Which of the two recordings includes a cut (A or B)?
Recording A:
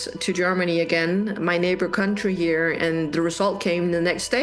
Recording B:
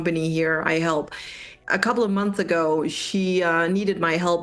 B